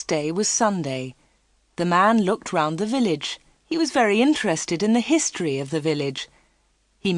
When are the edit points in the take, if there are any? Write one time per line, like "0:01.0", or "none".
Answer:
0:06.0

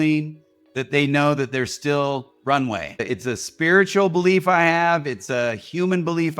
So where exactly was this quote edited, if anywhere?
0:02.9

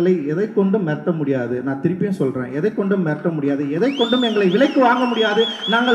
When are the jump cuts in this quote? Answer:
none

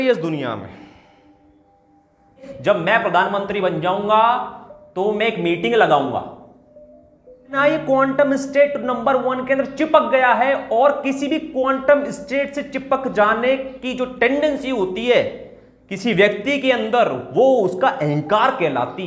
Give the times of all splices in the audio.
0:02.5
0:07.6

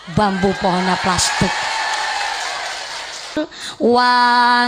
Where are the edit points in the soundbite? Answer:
0:03.4

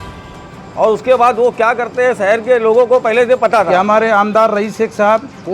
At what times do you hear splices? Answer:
0:03.7

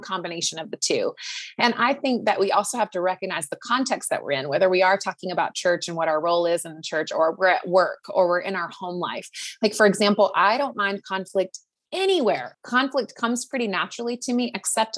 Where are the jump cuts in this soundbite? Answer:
0:12.5

